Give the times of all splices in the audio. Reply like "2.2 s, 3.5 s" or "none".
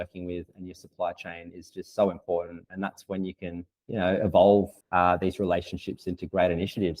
3.7 s, 4.8 s